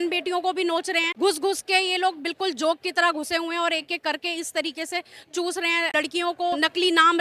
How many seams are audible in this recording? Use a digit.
2